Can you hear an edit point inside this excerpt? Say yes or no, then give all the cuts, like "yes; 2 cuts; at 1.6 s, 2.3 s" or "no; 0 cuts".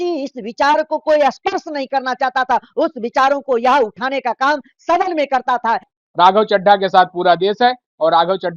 yes; 1 cut; at 5.9 s